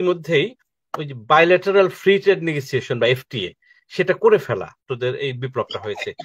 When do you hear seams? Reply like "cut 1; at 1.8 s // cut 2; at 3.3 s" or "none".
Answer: cut 1; at 4.8 s